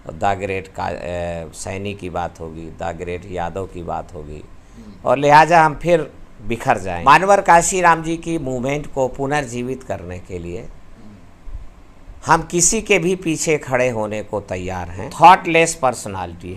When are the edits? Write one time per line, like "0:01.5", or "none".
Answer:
0:06.9
0:15.1